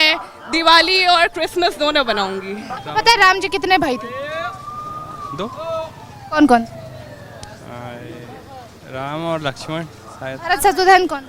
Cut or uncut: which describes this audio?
cut